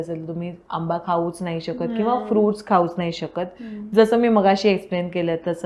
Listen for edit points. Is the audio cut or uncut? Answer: uncut